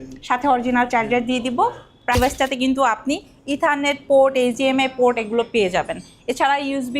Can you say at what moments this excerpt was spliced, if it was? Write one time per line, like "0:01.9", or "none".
0:02.2